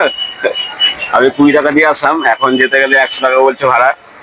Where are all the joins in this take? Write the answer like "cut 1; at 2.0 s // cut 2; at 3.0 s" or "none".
none